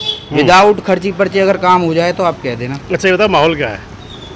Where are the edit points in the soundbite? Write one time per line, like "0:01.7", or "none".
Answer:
0:02.7